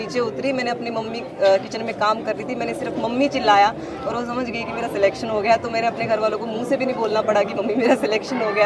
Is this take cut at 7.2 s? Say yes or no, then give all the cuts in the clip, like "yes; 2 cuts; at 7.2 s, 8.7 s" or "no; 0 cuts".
no; 0 cuts